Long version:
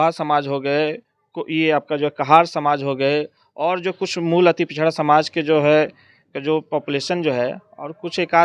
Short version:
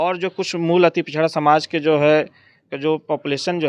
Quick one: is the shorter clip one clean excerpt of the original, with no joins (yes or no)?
yes